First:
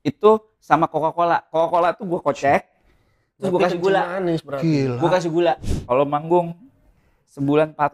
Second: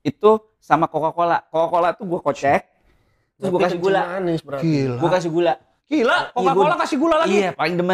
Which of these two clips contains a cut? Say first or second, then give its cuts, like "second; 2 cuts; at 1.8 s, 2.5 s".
first; 1 cut; at 5.7 s